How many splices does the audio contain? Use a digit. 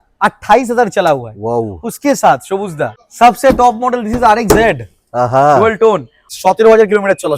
2